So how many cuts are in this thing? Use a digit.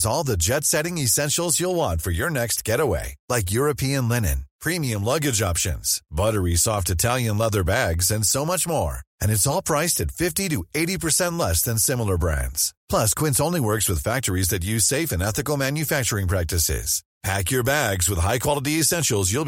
0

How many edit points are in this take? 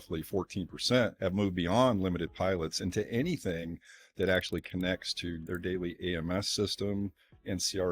2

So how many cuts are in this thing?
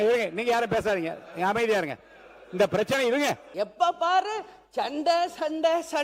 1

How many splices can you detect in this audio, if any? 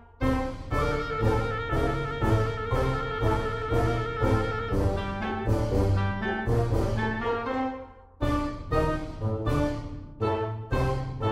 0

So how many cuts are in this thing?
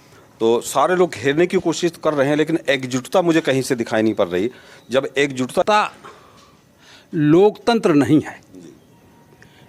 1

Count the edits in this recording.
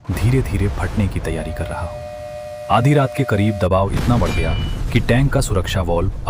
0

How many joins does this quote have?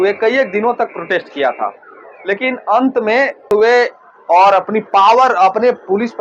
1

